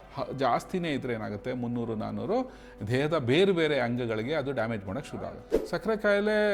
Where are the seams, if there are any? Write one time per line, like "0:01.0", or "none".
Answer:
0:05.5

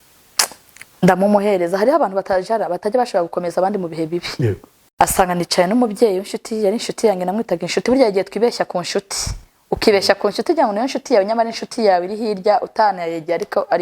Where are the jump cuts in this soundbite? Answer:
0:04.8

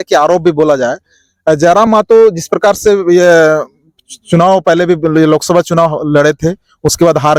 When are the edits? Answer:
none

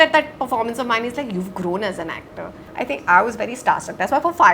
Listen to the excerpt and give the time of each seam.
0:02.6

